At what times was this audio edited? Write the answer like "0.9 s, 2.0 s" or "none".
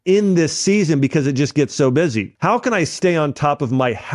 2.3 s